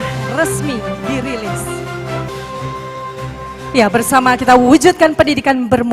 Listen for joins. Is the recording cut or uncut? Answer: cut